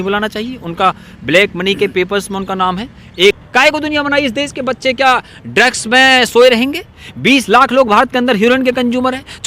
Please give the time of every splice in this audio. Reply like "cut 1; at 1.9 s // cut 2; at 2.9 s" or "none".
cut 1; at 3.4 s